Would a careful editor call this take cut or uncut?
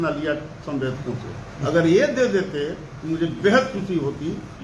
uncut